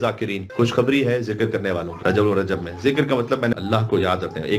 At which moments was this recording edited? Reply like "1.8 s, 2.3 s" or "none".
1.9 s, 3.5 s